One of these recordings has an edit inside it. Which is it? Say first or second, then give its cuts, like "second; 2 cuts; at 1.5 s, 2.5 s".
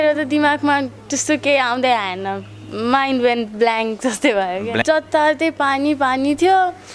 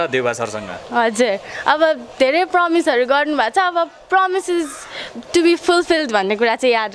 first; 1 cut; at 4.8 s